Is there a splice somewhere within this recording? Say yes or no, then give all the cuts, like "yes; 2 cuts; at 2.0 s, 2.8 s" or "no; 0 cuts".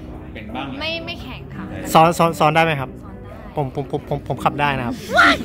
no; 0 cuts